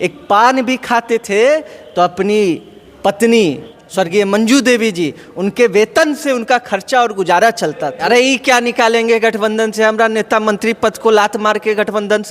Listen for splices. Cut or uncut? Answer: cut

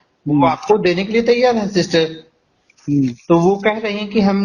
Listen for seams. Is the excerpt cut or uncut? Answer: uncut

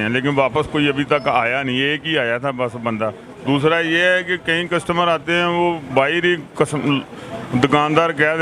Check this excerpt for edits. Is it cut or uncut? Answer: uncut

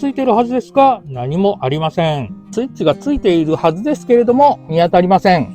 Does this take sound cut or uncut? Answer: cut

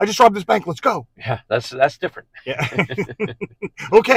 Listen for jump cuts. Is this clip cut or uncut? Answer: uncut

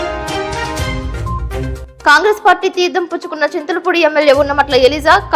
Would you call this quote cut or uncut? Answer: cut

